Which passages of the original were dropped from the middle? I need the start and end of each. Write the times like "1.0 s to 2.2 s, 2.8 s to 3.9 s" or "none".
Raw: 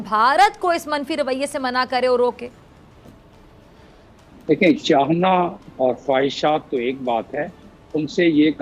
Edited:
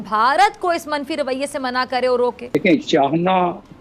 2.5 s to 4.5 s